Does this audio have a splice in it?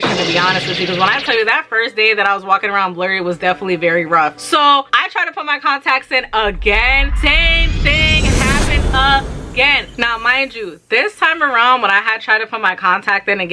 no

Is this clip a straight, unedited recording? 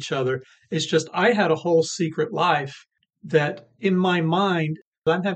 yes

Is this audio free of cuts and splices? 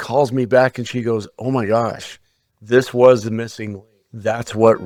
yes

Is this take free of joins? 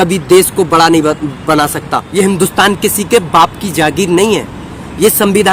no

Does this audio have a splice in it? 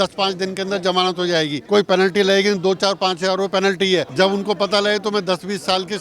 yes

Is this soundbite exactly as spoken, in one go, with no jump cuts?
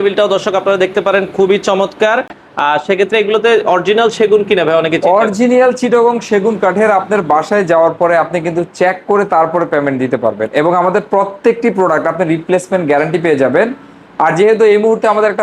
yes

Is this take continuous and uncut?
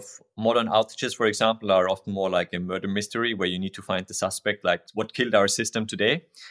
no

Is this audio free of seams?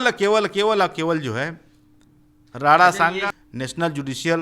no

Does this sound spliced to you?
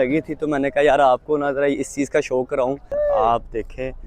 yes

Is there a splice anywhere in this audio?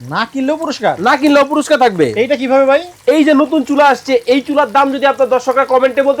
no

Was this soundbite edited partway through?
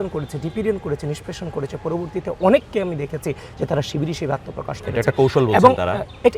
no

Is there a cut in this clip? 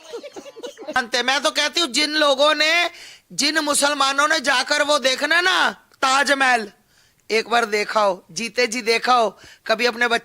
yes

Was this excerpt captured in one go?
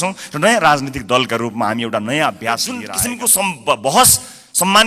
no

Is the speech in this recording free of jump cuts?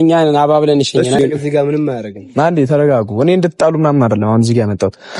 no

